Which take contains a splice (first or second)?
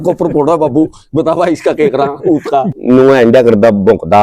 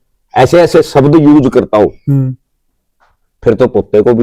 first